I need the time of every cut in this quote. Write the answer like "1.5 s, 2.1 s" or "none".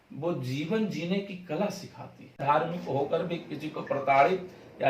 2.4 s